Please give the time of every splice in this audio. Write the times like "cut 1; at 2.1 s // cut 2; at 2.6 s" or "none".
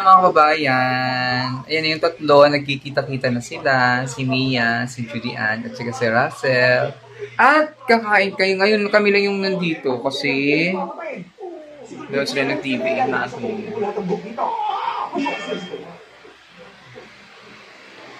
none